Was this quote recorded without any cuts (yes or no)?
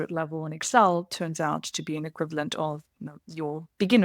yes